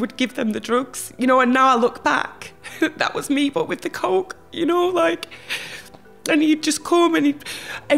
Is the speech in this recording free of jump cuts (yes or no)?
yes